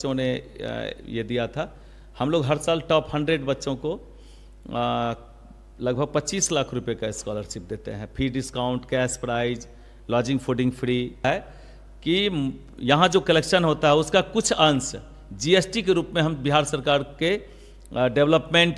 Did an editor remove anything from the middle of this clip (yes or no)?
yes